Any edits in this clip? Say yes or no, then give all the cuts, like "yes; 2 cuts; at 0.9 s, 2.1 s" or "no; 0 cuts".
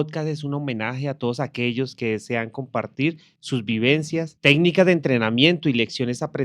yes; 1 cut; at 4.3 s